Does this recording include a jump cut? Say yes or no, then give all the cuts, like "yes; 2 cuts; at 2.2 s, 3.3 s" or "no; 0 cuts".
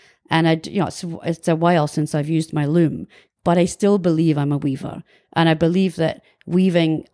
no; 0 cuts